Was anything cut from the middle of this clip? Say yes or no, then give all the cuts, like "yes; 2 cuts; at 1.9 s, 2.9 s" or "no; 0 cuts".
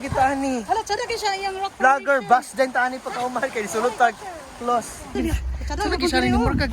yes; 1 cut; at 5.2 s